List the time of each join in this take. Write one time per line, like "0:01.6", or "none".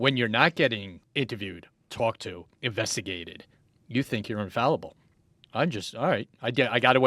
0:01.0